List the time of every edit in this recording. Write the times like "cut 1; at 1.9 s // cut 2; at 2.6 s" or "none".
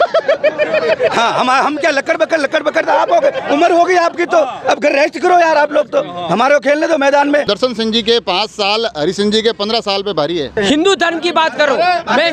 cut 1; at 7.5 s // cut 2; at 10.5 s